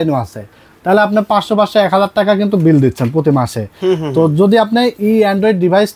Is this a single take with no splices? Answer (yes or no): yes